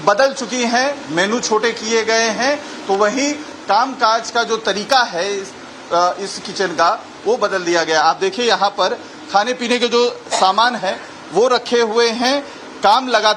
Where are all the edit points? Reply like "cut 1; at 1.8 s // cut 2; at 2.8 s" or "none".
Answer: none